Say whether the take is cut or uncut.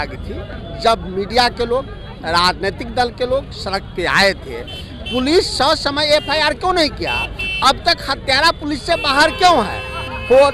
uncut